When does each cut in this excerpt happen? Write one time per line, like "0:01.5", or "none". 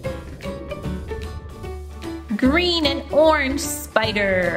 0:02.4